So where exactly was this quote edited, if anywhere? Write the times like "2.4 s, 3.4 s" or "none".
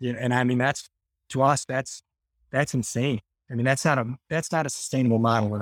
none